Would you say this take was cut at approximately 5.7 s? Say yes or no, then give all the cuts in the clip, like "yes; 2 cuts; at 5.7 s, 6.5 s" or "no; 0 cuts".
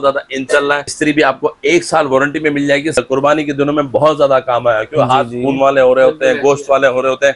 no; 2 cuts; at 0.9 s, 3.0 s